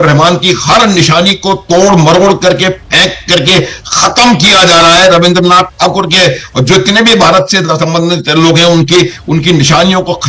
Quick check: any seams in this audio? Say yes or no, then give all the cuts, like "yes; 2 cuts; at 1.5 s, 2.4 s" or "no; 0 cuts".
no; 0 cuts